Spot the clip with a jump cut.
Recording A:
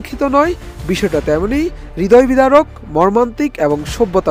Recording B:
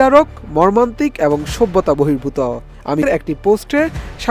B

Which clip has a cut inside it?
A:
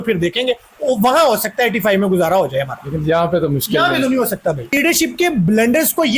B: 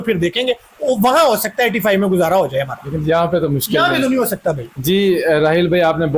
A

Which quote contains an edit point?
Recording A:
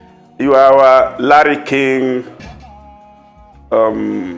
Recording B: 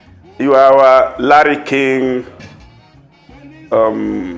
A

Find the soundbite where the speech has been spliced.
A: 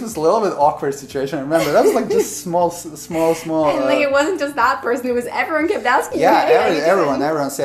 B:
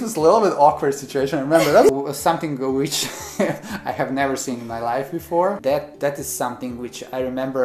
B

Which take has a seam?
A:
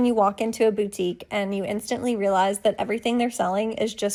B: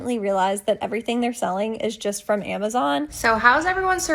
B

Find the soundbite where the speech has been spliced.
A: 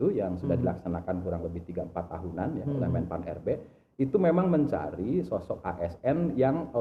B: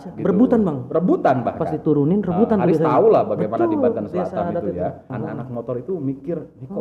B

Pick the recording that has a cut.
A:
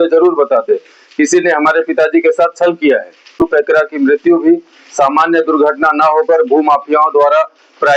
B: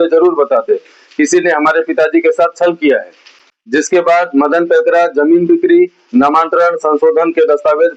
A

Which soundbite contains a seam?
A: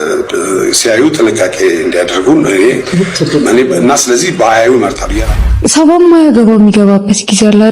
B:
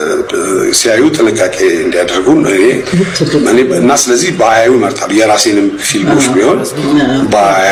A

